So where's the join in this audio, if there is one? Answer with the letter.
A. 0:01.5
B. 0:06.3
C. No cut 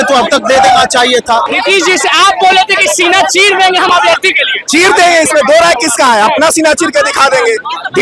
A